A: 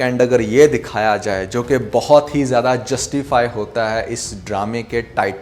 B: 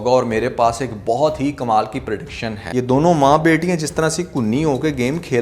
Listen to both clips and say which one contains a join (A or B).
B